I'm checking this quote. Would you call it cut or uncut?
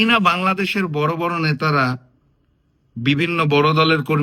uncut